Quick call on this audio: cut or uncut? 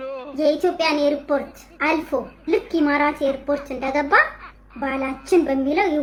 uncut